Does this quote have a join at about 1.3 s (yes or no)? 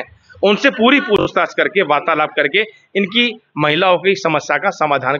yes